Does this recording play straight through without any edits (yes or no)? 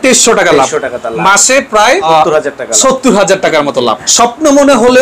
no